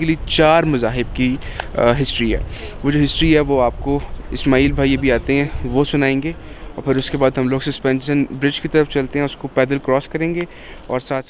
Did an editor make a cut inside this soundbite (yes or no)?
no